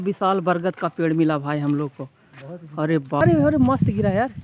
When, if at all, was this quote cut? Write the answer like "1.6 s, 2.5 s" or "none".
3.2 s